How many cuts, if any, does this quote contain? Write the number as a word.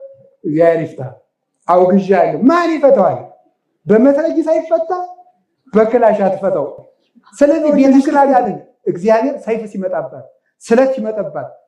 one